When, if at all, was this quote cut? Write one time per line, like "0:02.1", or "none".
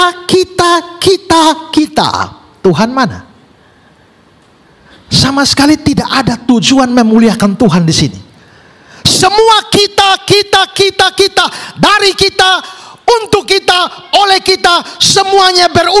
none